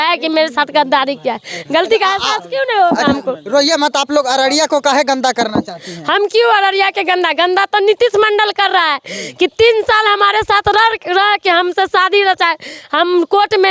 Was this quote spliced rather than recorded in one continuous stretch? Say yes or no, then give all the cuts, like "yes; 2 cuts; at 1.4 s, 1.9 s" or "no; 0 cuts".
no; 0 cuts